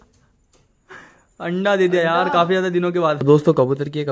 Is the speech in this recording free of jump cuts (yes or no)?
no